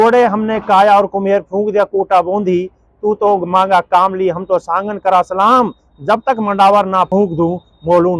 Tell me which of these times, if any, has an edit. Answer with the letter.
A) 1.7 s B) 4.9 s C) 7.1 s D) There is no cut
C